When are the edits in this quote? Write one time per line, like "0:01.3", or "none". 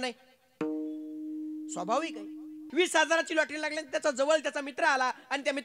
0:02.6